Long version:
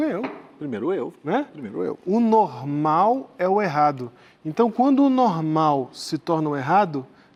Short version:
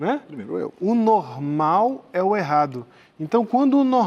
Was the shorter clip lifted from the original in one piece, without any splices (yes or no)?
yes